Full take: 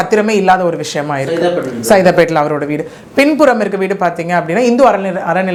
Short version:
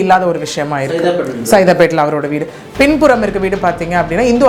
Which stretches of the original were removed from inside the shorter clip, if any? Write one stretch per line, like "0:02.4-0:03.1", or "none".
none